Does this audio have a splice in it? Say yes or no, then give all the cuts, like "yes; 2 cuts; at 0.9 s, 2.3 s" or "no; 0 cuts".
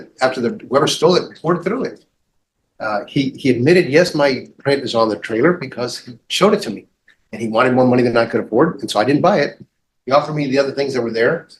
no; 0 cuts